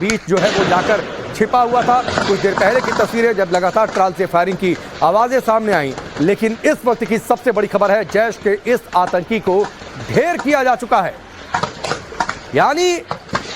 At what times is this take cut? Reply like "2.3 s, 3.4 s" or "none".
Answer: none